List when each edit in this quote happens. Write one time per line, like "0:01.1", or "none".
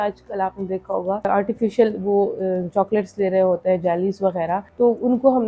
0:01.3
0:04.7